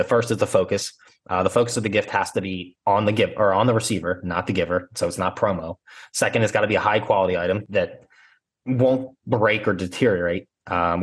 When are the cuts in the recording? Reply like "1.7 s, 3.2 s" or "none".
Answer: 7.6 s